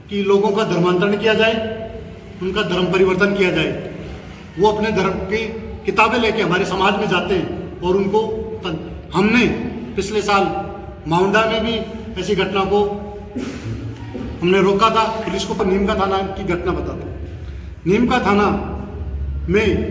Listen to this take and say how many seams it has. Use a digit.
1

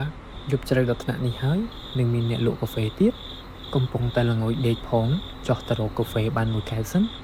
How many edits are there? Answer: 0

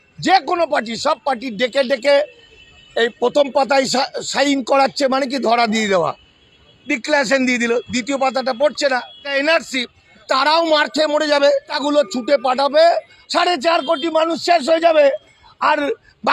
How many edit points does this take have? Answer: 4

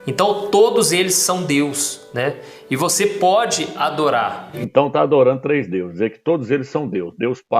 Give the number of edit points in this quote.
1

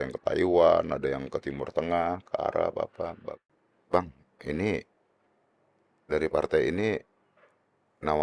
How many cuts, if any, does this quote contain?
1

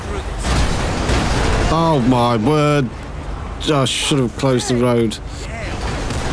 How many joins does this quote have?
0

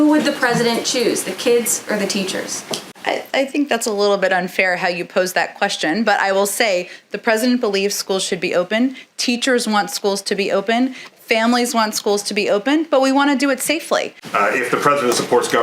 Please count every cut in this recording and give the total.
1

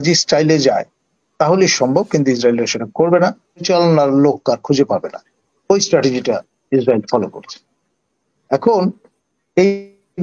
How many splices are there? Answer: 1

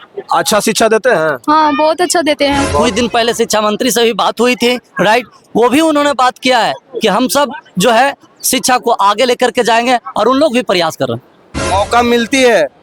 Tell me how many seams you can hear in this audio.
2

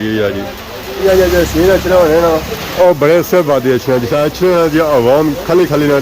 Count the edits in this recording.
2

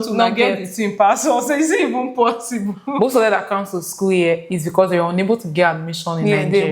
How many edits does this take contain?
1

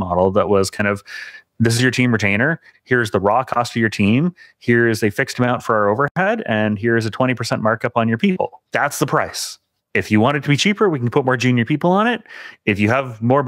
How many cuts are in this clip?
1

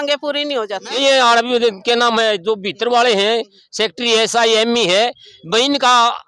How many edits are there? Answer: 1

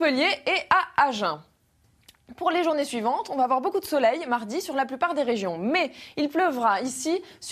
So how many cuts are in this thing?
1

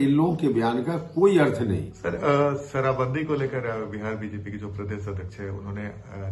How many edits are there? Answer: 1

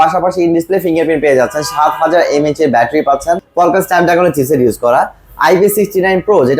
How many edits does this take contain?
1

